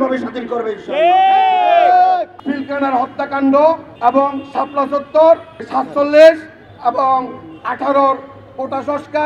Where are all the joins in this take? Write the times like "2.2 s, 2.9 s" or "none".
2.3 s, 3.9 s, 5.6 s